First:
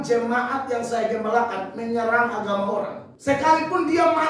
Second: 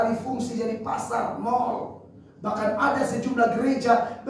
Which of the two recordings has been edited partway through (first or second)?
first